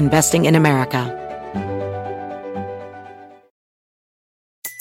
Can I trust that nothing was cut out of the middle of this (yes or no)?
no